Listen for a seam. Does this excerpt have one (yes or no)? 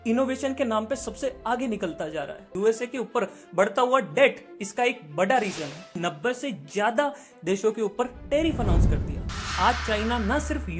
yes